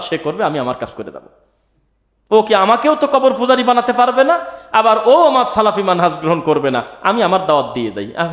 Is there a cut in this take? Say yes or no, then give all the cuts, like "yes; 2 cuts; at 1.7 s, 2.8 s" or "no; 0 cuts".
no; 0 cuts